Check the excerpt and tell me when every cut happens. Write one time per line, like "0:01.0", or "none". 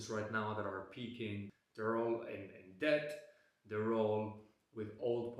0:01.5